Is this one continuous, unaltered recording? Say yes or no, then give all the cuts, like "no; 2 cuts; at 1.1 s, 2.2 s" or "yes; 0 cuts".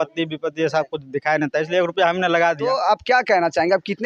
no; 1 cut; at 2.8 s